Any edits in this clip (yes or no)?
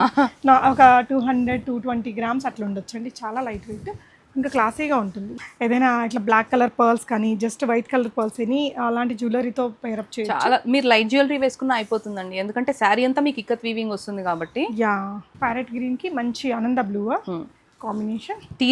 yes